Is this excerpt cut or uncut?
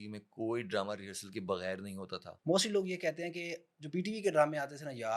cut